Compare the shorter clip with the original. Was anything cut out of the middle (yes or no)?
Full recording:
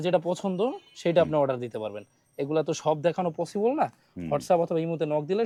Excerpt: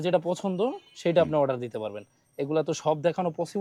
no